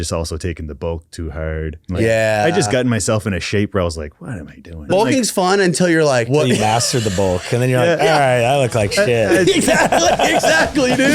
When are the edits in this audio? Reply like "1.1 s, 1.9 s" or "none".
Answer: 1.8 s, 4.9 s, 6.3 s